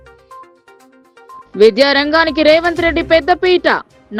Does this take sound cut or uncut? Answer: uncut